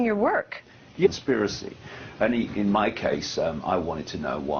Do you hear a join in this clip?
no; 0 cuts

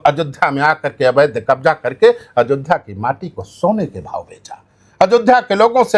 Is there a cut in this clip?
no; 0 cuts

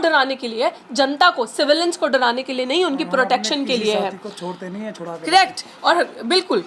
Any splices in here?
no; 0 cuts

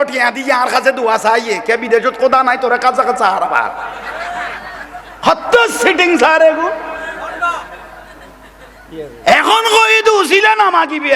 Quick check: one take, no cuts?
yes; 0 cuts

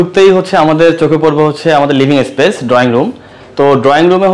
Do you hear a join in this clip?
no; 0 cuts

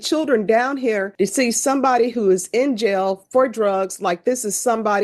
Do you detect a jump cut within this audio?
yes; 1 cut; at 1.1 s

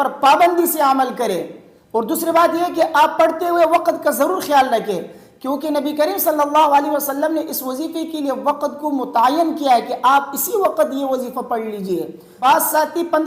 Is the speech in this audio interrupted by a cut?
yes; 2 cuts; at 1.7 s, 12.2 s

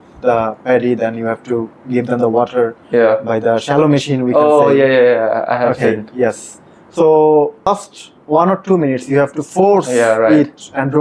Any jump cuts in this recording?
no; 0 cuts

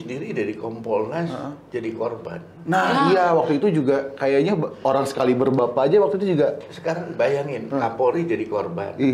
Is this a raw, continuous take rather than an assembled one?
yes; 0 cuts

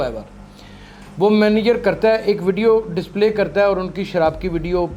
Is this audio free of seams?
yes; 0 cuts

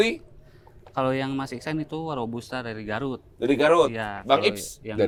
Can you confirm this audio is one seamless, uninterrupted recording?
yes; 0 cuts

